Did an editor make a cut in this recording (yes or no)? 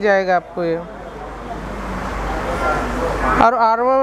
no